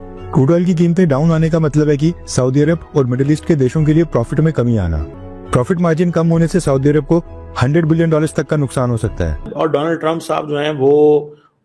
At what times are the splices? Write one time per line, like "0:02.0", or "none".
0:09.5